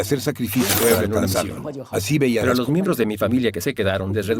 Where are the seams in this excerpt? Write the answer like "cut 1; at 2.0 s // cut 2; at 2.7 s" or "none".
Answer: cut 1; at 2.4 s